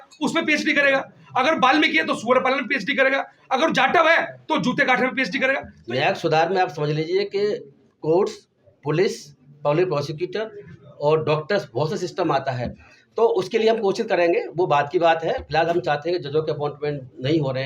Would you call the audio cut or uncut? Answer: cut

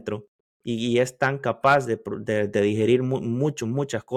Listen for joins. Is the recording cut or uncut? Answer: uncut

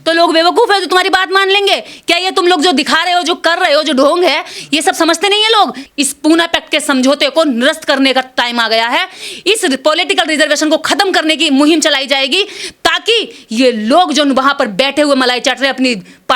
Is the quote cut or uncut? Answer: cut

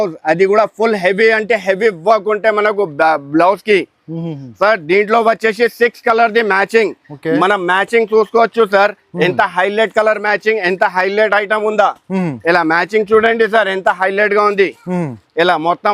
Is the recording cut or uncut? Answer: uncut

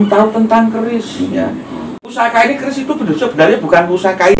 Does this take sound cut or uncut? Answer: cut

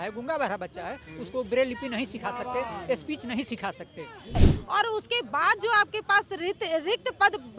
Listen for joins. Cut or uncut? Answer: cut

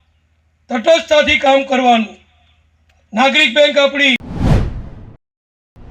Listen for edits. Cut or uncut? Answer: cut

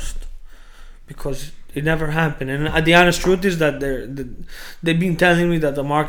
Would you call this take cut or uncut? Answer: uncut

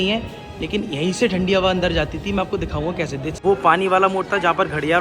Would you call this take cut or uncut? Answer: cut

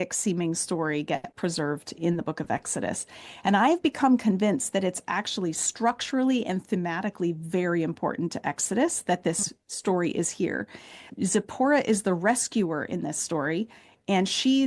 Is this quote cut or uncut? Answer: cut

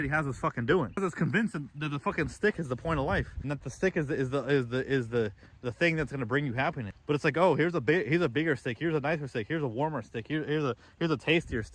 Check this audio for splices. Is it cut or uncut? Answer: cut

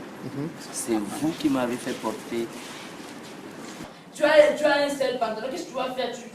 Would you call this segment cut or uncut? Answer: cut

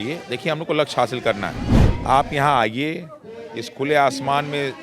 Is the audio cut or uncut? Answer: cut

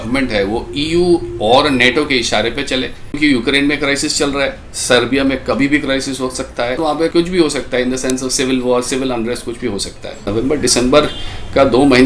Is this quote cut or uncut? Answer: cut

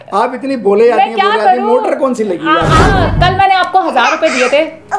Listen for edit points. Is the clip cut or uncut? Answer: cut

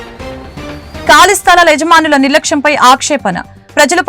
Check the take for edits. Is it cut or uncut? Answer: cut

